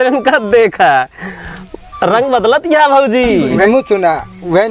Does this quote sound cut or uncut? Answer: cut